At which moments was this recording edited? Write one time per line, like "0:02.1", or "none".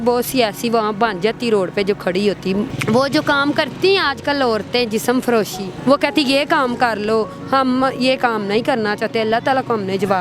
0:02.7
0:05.7